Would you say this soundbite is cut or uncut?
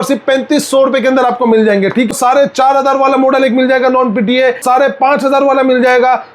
cut